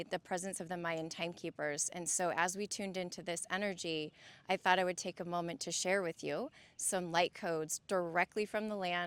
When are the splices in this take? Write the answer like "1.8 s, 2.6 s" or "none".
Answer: none